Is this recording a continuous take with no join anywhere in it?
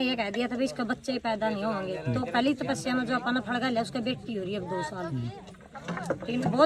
yes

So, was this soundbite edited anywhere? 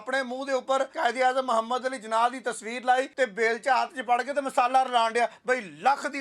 yes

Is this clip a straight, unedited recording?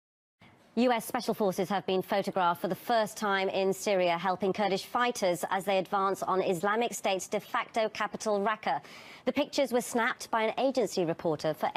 yes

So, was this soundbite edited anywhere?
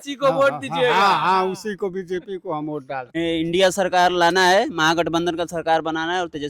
yes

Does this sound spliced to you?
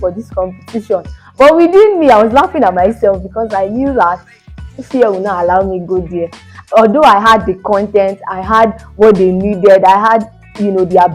no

